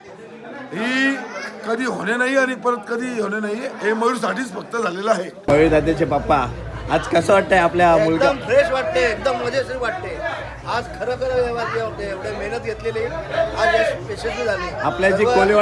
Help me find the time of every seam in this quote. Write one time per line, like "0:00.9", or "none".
0:05.4